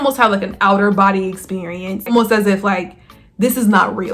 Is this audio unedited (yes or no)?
no